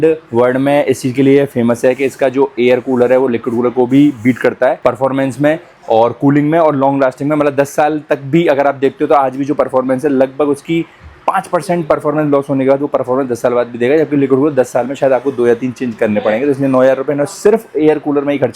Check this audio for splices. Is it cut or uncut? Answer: uncut